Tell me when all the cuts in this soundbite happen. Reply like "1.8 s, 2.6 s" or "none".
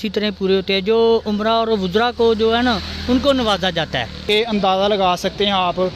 4.2 s